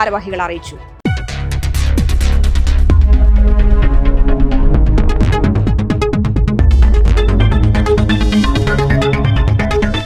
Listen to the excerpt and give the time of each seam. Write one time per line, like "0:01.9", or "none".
none